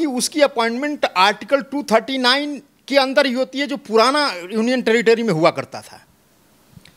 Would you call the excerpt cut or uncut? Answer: uncut